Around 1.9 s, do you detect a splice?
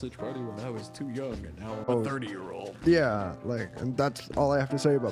yes; 1 cut; at 1.9 s

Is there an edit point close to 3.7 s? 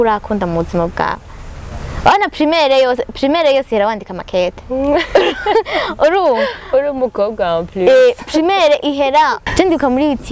no; 1 cut; at 9.4 s

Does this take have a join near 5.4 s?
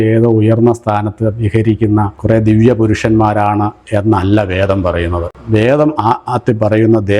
no; 0 cuts

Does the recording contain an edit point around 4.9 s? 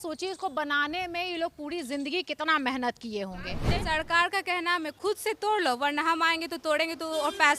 yes; 2 cuts; at 3.7 s, 4.9 s

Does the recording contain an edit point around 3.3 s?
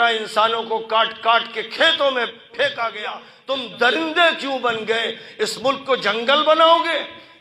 yes; 1 cut; at 3.3 s

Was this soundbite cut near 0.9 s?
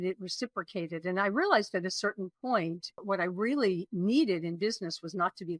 no; 1 cut; at 3.0 s

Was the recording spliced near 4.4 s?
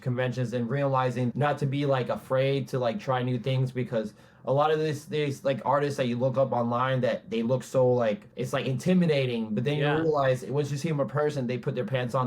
no; 2 cuts; at 1.3 s, 8.3 s

